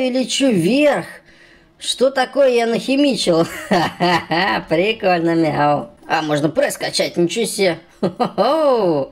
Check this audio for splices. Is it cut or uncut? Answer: cut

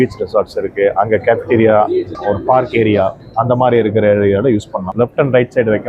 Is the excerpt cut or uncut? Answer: cut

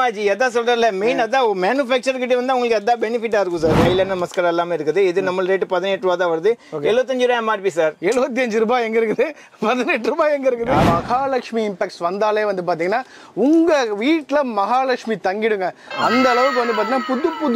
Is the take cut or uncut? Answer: cut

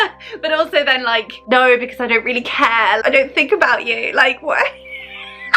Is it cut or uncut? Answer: cut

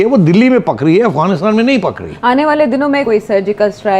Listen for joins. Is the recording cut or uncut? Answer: cut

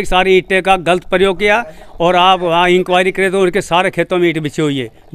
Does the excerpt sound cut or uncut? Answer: uncut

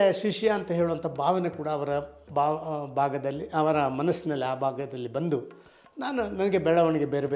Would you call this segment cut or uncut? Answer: uncut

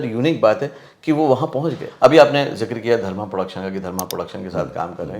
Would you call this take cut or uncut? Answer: cut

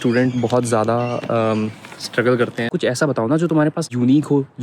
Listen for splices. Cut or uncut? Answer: cut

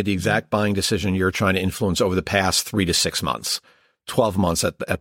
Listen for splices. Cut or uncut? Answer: uncut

